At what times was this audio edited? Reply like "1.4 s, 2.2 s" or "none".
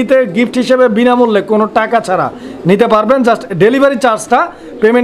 none